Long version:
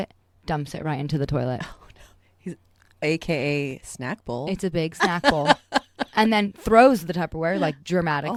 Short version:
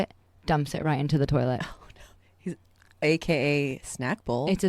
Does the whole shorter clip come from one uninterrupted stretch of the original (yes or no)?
yes